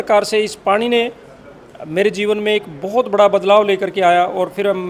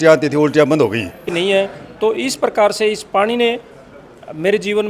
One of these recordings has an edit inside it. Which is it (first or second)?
second